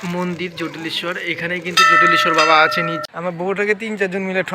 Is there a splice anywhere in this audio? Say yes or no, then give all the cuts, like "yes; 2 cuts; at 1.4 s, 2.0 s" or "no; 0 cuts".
yes; 1 cut; at 3.0 s